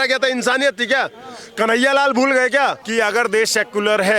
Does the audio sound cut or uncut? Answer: cut